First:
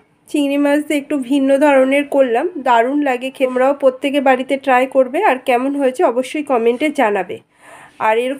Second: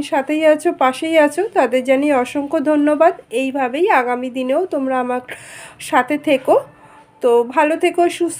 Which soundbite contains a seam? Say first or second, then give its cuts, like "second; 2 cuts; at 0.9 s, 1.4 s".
first; 1 cut; at 3.5 s